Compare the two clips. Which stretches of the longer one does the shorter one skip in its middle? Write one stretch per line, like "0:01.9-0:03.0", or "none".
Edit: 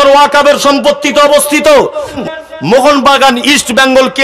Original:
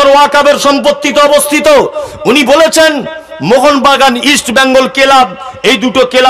0:02.2-0:03.0